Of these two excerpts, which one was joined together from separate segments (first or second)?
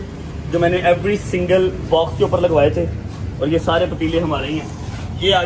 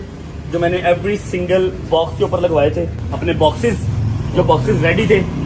second